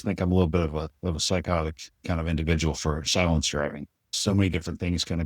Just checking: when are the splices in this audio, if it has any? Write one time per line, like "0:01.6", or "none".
0:04.1